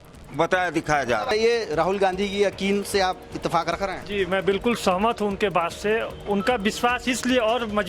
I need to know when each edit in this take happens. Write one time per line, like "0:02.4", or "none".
0:01.3

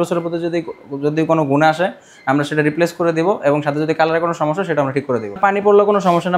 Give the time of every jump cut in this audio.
0:05.4

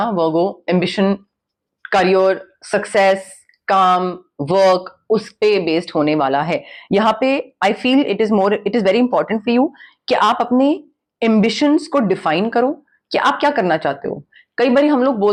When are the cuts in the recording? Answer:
none

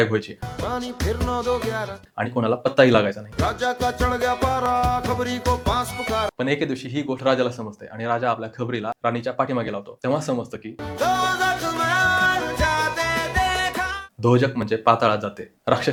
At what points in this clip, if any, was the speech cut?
none

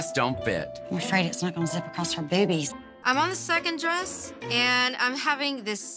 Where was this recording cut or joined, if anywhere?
0:02.9

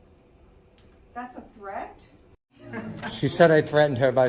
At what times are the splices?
0:02.7

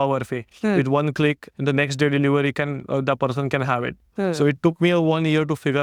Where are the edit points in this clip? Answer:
none

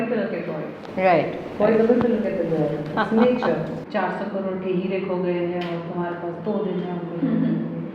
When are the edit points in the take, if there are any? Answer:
0:03.8

